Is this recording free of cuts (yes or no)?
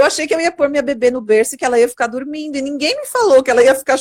yes